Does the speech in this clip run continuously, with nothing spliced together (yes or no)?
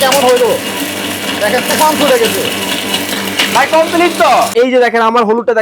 no